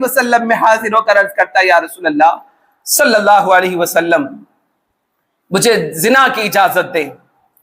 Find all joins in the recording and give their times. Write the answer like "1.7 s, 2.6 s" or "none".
none